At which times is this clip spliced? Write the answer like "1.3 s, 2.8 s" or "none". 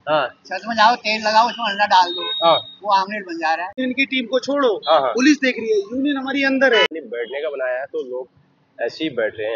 3.8 s, 6.9 s